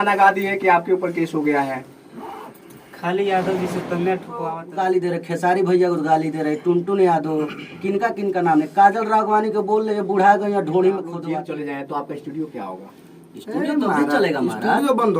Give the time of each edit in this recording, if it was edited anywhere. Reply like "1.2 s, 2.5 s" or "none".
4.6 s, 11.2 s